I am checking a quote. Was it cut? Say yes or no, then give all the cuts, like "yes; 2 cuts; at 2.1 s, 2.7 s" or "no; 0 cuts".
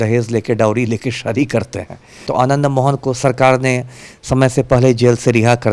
yes; 1 cut; at 2.3 s